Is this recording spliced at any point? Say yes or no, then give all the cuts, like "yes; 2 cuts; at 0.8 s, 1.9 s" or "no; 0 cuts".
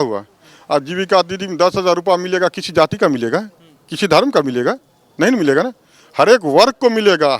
no; 0 cuts